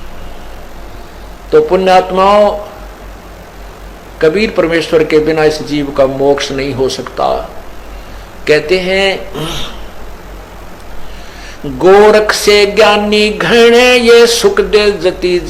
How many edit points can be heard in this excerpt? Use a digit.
1